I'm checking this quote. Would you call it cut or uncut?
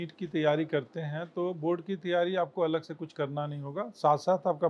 uncut